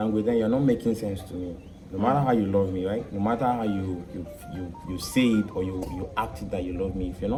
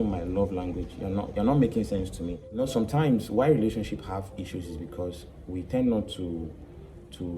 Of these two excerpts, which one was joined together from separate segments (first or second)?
second